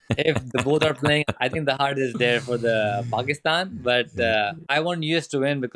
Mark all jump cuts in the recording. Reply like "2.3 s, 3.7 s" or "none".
1.2 s, 4.6 s